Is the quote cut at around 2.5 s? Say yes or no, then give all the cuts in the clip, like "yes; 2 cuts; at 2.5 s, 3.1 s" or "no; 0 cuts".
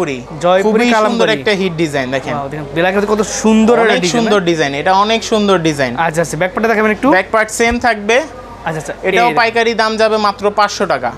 no; 0 cuts